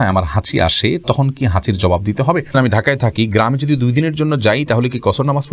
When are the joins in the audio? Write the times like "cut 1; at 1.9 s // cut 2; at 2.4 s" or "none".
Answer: cut 1; at 2.5 s